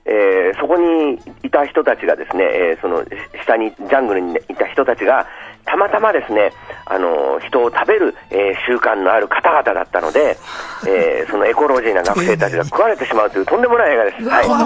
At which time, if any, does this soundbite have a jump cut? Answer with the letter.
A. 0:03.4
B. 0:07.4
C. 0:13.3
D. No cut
C